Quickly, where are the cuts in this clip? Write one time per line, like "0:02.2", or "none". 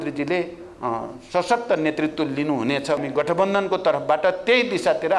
0:03.0